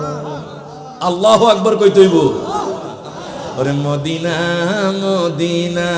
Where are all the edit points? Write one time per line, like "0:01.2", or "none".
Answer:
0:03.1